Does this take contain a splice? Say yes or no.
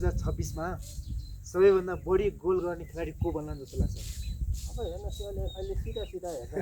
no